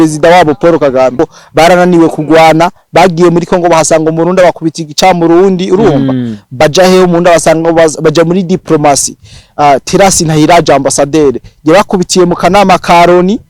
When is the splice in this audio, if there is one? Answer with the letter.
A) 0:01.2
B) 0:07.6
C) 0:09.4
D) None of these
A